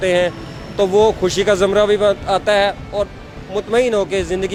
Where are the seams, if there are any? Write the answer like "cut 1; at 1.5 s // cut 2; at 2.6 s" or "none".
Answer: none